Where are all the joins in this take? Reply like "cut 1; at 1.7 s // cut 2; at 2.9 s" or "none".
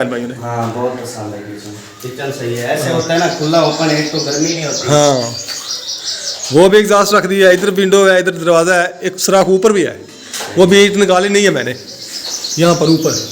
none